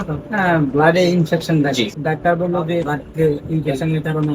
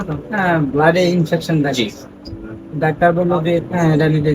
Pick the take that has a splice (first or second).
first